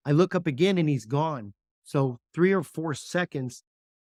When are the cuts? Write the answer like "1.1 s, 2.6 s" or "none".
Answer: none